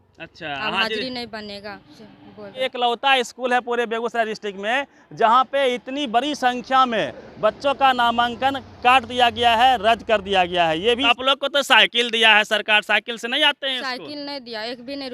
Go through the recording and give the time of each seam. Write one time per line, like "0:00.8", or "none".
0:02.6
0:11.0

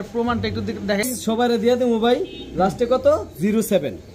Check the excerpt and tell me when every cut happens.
0:01.1

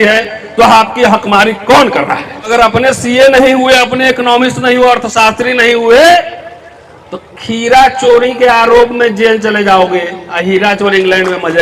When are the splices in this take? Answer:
0:02.5

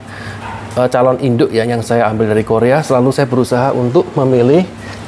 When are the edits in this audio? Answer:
none

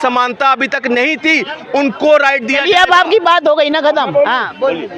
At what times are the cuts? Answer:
none

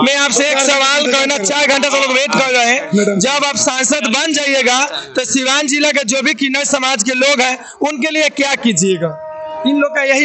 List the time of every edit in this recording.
none

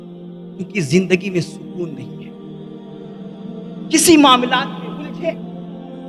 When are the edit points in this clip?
0:02.0
0:03.7

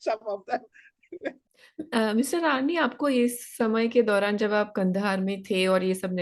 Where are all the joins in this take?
0:01.4

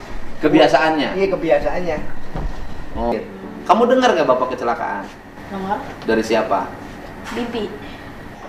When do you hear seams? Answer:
0:03.1

